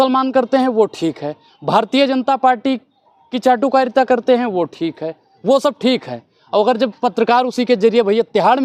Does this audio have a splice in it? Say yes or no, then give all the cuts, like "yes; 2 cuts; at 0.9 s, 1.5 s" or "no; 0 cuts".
no; 0 cuts